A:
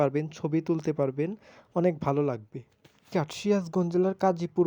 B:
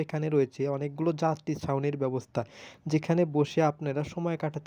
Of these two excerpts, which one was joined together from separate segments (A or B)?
A